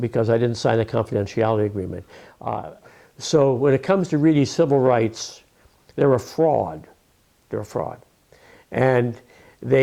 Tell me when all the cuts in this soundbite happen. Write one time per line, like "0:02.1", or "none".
0:02.7